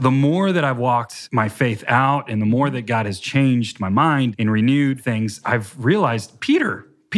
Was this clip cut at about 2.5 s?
no; 4 cuts; at 1.2 s, 4.3 s, 5.3 s, 6.3 s

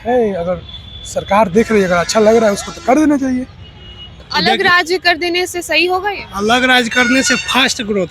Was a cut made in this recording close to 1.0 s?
no; 1 cut; at 4.0 s

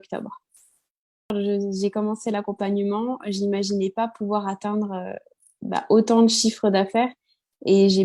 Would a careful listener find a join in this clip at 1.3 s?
yes; 1 cut; at 1.3 s

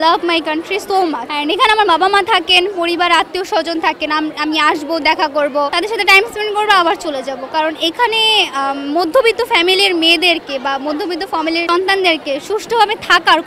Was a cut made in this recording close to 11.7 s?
yes; 3 cuts; at 1.3 s, 5.7 s, 11.7 s

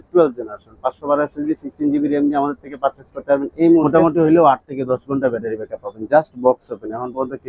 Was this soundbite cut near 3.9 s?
yes; 1 cut; at 3.9 s

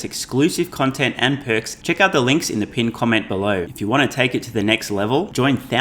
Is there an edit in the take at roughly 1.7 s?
yes; 2 cuts; at 1.7 s, 3.7 s

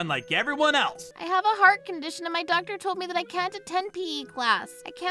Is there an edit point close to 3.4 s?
no; 1 cut; at 1.0 s

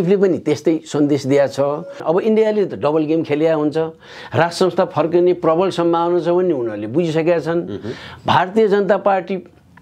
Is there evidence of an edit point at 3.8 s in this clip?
no; 1 cut; at 1.9 s

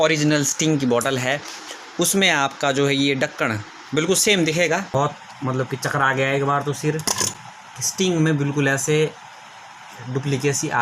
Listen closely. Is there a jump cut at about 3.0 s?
no; 1 cut; at 4.9 s

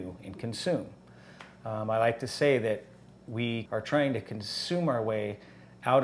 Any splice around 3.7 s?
yes; 1 cut; at 3.7 s

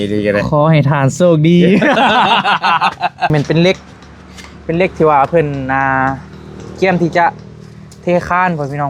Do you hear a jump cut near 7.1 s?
no; 1 cut; at 3.3 s

